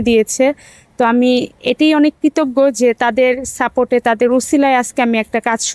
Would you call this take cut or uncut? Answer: uncut